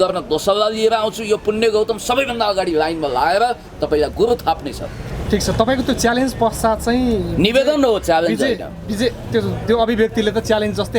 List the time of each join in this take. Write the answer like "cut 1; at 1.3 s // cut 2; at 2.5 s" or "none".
none